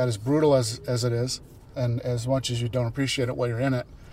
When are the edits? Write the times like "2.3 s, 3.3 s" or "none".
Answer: 1.6 s